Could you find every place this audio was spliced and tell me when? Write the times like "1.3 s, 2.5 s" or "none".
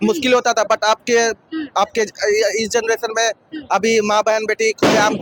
none